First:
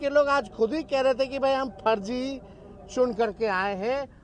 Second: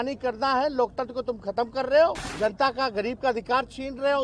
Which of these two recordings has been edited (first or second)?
second